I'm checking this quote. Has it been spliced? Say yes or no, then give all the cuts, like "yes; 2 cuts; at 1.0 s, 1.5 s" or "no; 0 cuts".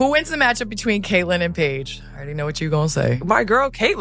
no; 0 cuts